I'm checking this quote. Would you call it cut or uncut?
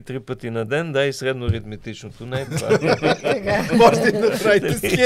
uncut